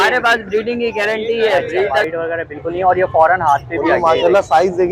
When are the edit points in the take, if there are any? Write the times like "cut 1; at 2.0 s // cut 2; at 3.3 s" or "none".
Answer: cut 1; at 2.0 s